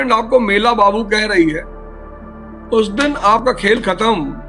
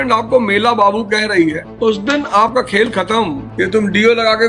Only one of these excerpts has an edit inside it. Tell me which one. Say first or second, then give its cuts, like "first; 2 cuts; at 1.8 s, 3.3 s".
second; 2 cuts; at 1.7 s, 3.4 s